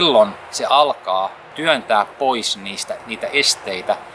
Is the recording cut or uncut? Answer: cut